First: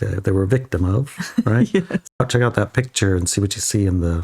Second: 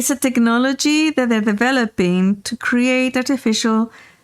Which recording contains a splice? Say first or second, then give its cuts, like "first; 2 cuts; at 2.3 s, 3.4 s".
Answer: first; 1 cut; at 2.2 s